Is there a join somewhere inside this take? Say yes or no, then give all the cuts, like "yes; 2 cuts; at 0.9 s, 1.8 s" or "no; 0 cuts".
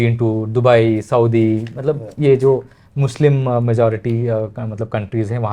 no; 0 cuts